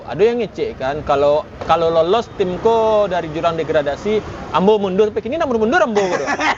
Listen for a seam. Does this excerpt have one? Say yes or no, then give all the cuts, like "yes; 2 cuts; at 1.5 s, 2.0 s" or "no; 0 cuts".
no; 0 cuts